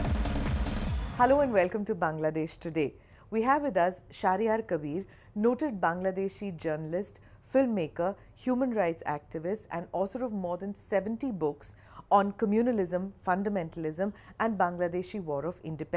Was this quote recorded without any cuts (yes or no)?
no